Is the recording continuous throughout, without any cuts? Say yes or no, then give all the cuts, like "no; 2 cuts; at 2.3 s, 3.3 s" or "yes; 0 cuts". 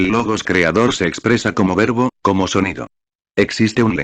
no; 1 cut; at 1.8 s